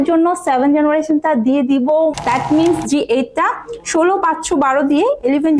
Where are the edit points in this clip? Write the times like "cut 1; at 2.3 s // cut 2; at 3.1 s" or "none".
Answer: cut 1; at 2.1 s

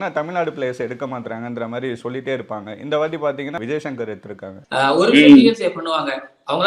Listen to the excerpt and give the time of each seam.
cut 1; at 3.6 s // cut 2; at 4.5 s

